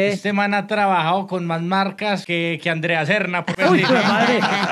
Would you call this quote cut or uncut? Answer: cut